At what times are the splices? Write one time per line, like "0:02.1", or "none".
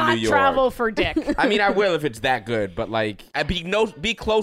0:03.3